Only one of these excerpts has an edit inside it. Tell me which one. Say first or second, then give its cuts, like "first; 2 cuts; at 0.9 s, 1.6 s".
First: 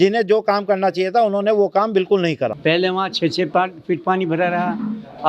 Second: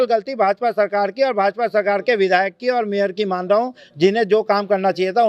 first; 1 cut; at 2.6 s